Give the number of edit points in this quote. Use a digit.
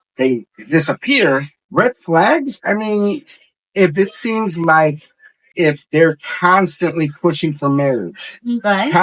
2